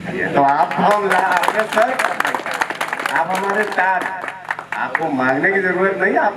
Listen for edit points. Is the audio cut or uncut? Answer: uncut